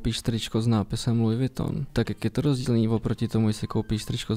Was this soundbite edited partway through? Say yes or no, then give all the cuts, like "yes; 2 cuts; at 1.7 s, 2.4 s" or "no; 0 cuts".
yes; 1 cut; at 1.9 s